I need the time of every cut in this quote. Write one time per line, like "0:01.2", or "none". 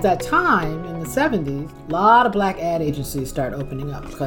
0:01.7

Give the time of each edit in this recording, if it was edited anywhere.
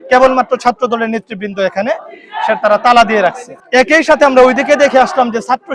0:03.5

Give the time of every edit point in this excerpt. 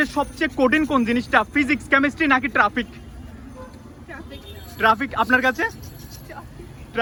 none

